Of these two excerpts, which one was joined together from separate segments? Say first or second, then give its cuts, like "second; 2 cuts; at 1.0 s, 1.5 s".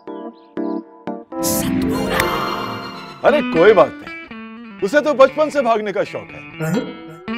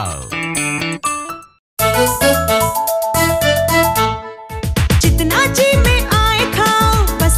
second; 1 cut; at 1.6 s